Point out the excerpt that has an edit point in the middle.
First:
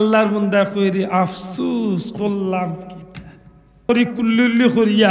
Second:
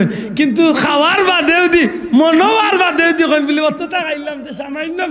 first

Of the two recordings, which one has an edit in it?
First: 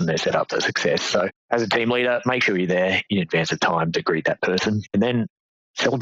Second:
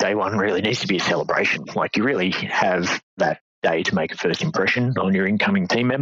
first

